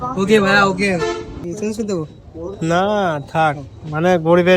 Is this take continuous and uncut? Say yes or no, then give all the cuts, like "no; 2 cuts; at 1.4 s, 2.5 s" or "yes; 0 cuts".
no; 1 cut; at 1.5 s